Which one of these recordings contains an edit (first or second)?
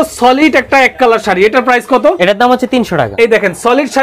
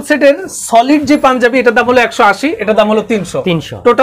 first